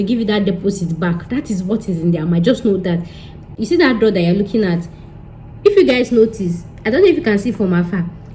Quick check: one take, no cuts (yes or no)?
no